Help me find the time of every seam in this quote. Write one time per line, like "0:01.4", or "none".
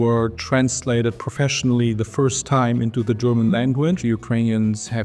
0:04.0